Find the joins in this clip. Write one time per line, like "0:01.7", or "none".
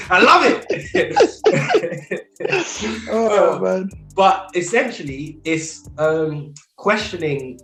none